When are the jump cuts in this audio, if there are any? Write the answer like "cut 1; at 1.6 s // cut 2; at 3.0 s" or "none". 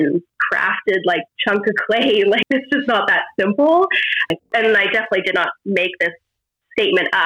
cut 1; at 1.3 s // cut 2; at 2.4 s // cut 3; at 4.5 s